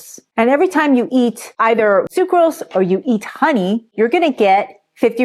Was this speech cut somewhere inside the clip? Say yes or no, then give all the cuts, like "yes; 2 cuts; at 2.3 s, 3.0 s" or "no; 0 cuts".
yes; 1 cut; at 2.1 s